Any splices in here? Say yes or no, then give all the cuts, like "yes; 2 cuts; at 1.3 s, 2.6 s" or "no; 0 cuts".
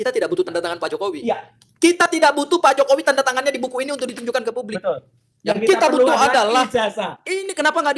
no; 0 cuts